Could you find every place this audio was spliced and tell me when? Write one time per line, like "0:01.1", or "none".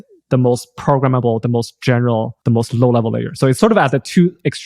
0:02.4
0:03.6